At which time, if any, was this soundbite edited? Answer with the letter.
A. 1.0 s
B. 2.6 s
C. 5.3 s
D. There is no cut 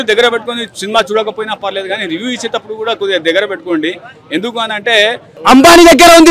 C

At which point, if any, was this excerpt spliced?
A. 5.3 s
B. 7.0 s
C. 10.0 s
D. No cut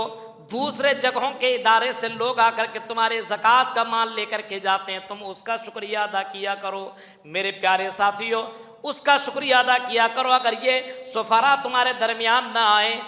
D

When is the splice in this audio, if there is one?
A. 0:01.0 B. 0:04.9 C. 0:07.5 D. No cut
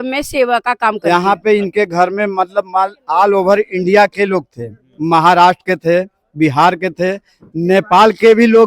A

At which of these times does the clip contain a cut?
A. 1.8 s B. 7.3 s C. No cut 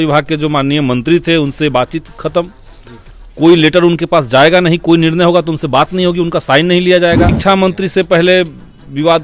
B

